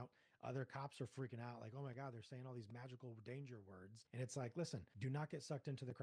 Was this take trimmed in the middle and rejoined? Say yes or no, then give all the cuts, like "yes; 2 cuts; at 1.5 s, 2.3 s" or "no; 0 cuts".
yes; 2 cuts; at 4.0 s, 4.9 s